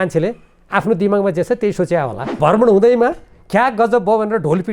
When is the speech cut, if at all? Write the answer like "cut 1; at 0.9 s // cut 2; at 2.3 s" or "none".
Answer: cut 1; at 2.4 s

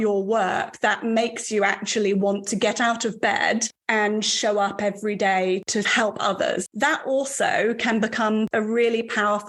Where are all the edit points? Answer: cut 1; at 5.7 s // cut 2; at 6.7 s // cut 3; at 8.5 s

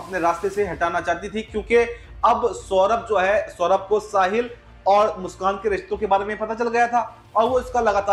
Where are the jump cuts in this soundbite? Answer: none

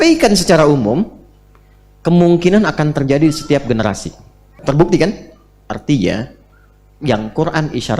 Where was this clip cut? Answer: cut 1; at 4.6 s

